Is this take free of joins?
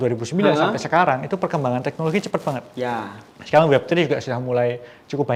yes; 0 cuts

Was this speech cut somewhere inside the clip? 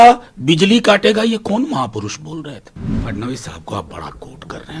yes; 1 cut; at 3.0 s

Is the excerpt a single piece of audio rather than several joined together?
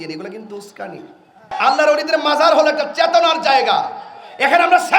no; 1 cut; at 1.5 s

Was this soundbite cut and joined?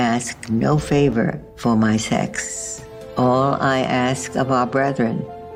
no; 0 cuts

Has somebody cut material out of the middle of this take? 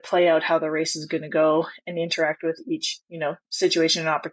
no; 0 cuts

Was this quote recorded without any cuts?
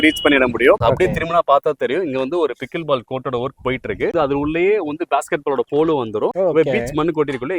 no; 2 cuts; at 0.8 s, 4.1 s

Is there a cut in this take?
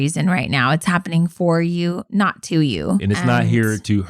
yes; 1 cut; at 3.0 s

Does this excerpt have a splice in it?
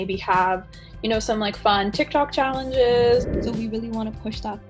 yes; 1 cut; at 3.3 s

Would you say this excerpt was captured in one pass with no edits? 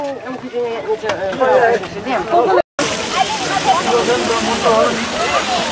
no; 1 cut; at 2.7 s

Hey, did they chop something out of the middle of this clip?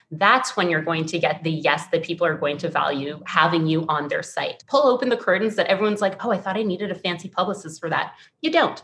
yes; 1 cut; at 4.6 s

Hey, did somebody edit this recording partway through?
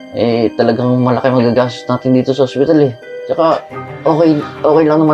no; 0 cuts

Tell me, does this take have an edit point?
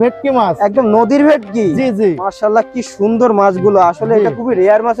no; 0 cuts

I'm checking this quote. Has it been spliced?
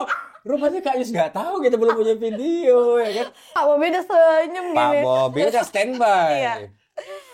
yes; 1 cut; at 3.5 s

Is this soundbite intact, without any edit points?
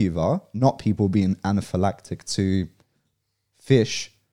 yes; 0 cuts

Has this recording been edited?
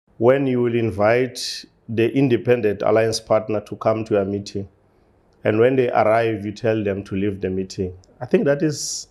no; 0 cuts

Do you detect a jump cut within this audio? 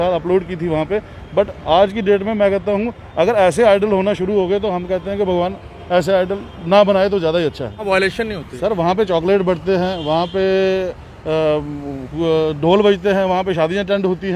yes; 1 cut; at 7.9 s

